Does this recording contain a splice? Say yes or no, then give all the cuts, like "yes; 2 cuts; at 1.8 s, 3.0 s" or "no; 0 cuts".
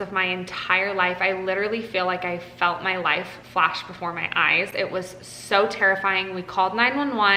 no; 0 cuts